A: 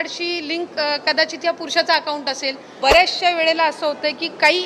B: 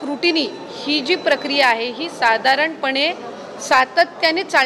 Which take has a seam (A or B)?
A